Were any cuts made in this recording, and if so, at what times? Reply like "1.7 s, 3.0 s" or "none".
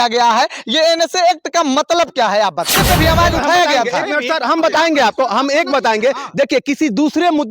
2.7 s